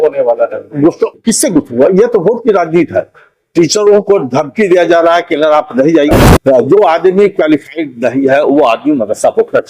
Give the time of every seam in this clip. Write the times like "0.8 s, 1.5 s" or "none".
6.1 s